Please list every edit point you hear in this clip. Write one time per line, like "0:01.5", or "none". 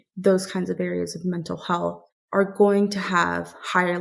0:02.1